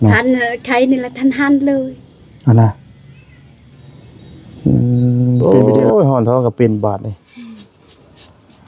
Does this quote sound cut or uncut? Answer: cut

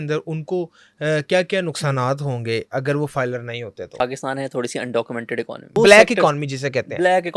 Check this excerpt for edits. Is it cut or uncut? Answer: cut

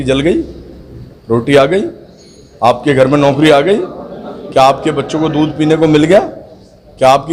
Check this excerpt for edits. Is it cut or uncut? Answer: uncut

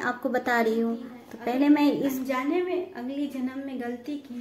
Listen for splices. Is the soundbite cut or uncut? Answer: cut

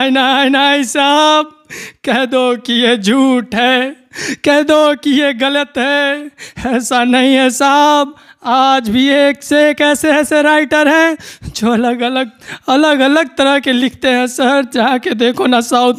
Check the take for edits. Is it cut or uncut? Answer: uncut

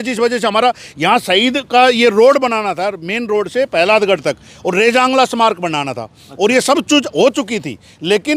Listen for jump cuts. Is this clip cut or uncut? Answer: uncut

